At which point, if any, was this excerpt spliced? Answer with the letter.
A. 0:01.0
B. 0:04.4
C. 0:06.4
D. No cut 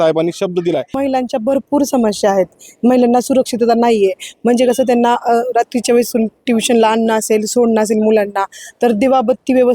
A